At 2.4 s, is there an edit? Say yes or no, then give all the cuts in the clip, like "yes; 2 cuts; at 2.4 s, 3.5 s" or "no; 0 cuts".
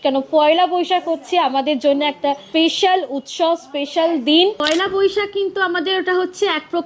yes; 2 cuts; at 2.4 s, 4.6 s